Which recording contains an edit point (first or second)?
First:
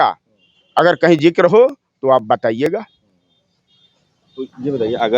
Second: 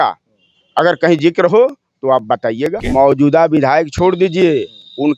second